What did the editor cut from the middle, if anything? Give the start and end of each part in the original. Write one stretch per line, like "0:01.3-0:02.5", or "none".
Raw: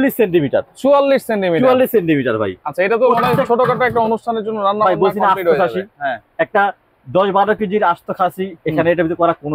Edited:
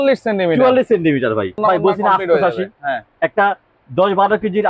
0:02.6-0:04.7